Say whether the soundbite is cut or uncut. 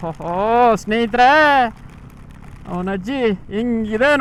uncut